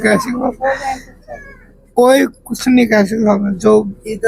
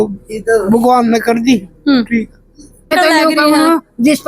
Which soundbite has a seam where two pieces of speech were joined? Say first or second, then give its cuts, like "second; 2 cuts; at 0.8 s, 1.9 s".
second; 1 cut; at 2.9 s